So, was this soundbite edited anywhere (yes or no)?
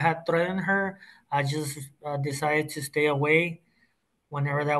no